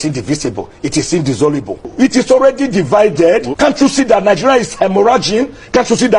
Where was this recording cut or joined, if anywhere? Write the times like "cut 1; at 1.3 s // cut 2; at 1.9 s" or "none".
cut 1; at 1.9 s // cut 2; at 3.5 s

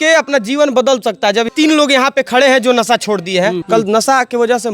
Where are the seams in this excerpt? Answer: cut 1; at 1.5 s // cut 2; at 3.6 s

